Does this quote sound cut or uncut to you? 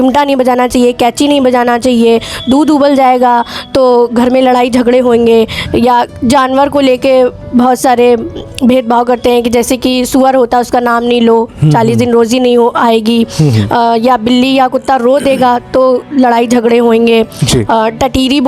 uncut